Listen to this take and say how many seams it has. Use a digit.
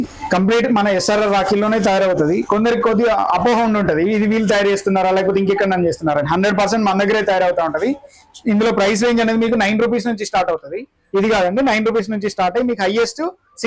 0